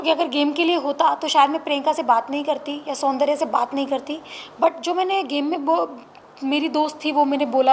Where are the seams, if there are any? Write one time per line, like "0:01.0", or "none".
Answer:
none

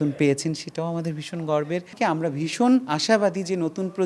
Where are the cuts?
0:01.9

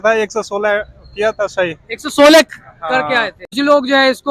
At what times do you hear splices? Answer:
0:03.4

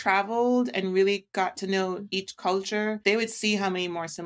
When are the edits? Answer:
0:03.0

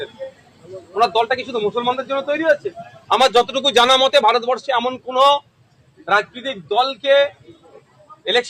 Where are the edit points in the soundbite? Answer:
none

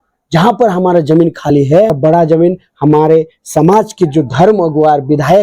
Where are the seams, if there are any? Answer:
0:02.0

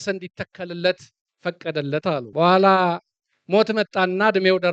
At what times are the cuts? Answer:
0:02.3

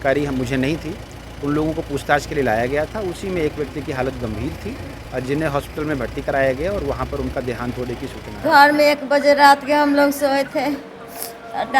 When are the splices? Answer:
0:08.3

